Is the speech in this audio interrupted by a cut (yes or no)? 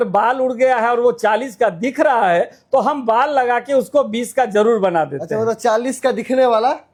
no